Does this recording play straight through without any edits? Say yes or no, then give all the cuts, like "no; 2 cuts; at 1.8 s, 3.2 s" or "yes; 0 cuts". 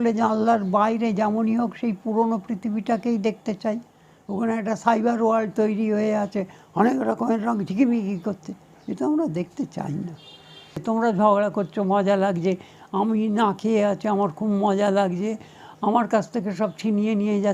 no; 1 cut; at 10.8 s